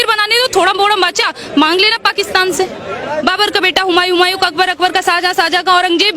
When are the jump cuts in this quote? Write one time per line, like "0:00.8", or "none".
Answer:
0:03.2